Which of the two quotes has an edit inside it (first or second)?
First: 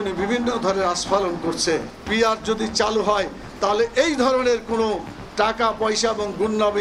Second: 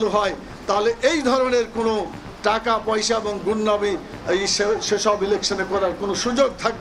first